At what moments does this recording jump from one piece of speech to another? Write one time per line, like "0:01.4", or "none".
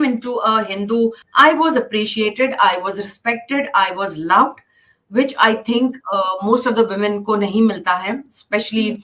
0:01.2